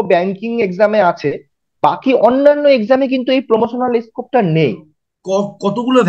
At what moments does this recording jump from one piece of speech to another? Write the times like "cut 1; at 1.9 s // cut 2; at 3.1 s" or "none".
cut 1; at 4.8 s

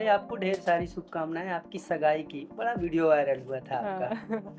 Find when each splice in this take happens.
none

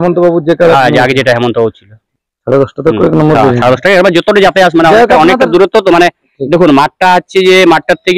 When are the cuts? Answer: cut 1; at 2.0 s

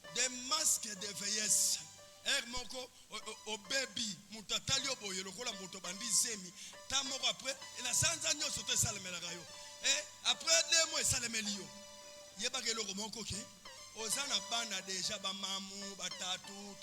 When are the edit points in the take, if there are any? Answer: none

